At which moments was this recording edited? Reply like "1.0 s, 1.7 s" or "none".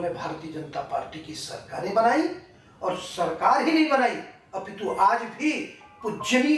none